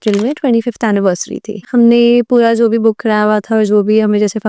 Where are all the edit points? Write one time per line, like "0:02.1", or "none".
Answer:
0:01.7